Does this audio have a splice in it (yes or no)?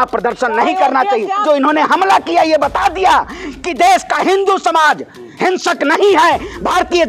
yes